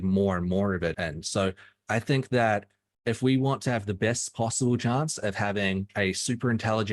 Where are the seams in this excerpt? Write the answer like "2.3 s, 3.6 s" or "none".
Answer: 0.9 s, 5.9 s